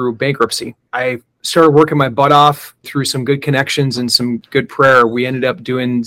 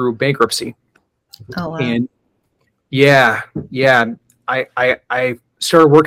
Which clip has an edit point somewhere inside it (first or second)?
first